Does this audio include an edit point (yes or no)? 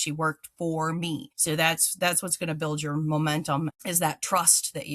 yes